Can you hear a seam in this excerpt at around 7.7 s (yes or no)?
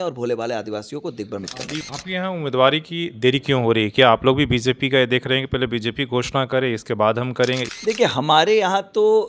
yes